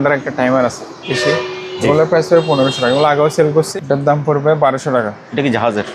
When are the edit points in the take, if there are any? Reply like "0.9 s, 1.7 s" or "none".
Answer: 1.1 s, 3.7 s

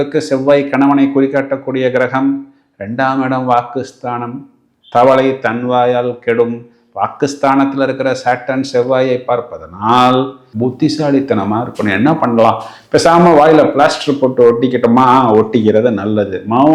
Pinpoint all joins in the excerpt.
10.4 s

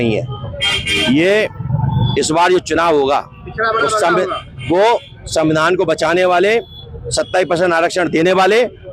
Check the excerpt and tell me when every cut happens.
none

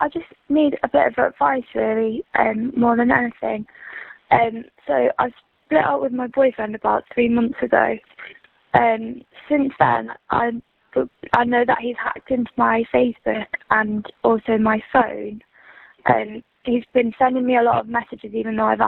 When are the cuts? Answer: none

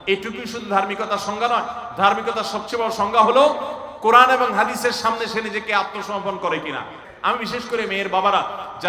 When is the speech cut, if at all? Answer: 7.0 s

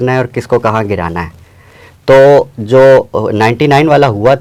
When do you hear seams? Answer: none

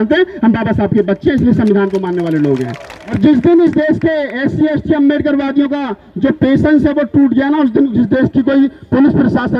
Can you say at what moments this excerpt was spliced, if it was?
3.2 s

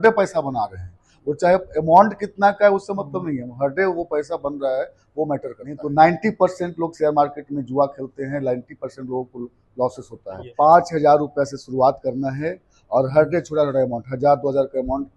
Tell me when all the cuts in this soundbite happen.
5.8 s, 10.4 s

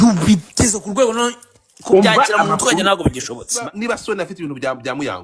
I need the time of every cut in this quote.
3.5 s

